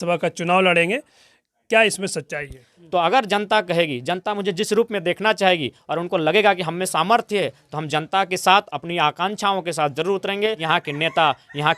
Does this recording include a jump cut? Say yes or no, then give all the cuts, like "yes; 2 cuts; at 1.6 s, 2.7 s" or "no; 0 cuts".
yes; 2 cuts; at 2.7 s, 10.6 s